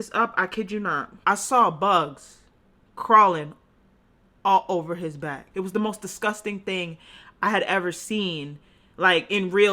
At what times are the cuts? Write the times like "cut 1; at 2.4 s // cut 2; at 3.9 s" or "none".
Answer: cut 1; at 1.1 s // cut 2; at 5.4 s